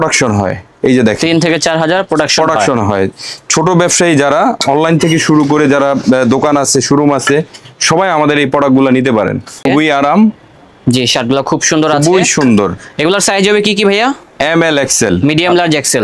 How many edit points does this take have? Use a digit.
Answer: 1